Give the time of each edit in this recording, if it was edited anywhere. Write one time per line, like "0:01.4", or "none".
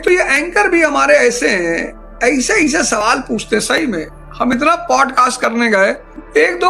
none